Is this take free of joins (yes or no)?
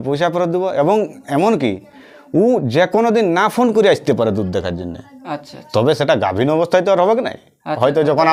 yes